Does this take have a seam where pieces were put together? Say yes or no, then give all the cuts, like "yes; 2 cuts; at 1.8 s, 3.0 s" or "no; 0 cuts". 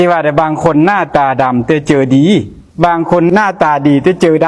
yes; 1 cut; at 3.4 s